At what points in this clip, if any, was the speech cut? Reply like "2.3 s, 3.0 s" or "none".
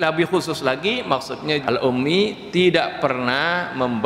1.6 s